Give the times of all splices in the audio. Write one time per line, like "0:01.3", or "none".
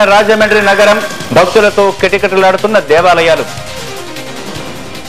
none